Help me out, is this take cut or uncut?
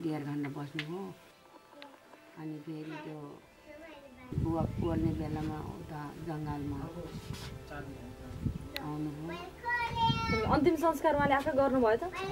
cut